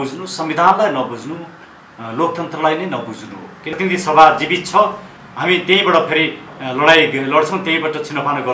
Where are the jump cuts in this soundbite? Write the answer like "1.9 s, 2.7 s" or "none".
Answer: 3.7 s